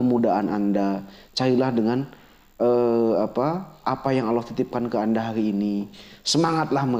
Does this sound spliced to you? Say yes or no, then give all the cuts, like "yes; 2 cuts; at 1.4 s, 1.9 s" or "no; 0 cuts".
no; 0 cuts